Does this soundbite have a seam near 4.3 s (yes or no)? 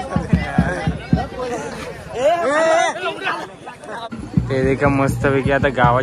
yes